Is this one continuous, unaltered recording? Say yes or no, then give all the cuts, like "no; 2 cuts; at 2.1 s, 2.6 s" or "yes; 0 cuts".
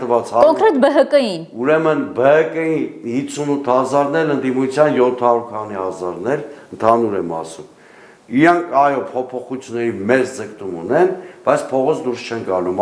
yes; 0 cuts